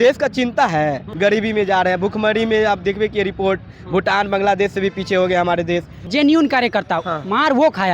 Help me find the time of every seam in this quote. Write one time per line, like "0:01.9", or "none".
0:01.1
0:06.0